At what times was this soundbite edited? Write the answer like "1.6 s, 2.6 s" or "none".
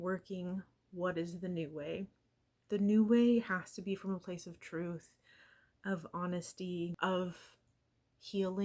7.0 s